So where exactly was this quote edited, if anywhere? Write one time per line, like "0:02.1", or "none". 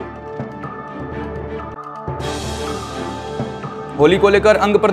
0:01.7
0:03.6